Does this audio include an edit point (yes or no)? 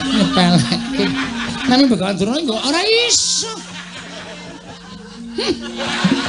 no